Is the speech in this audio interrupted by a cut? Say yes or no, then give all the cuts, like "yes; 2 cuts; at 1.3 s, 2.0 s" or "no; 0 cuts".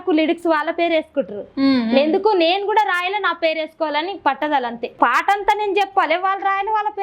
yes; 1 cut; at 4.9 s